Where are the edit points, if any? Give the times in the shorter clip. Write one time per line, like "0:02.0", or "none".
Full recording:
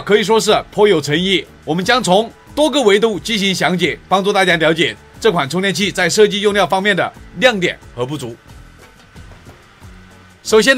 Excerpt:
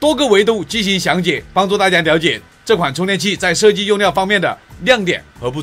none